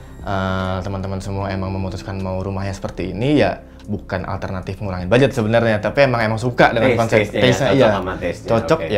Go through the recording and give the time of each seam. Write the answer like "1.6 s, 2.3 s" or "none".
none